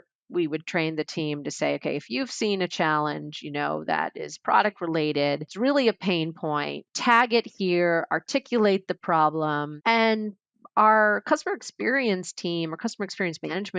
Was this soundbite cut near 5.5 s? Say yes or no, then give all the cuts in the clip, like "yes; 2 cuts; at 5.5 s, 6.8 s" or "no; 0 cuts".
yes; 3 cuts; at 5.5 s, 6.9 s, 9.7 s